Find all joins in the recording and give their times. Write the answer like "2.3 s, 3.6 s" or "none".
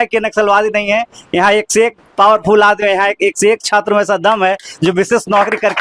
none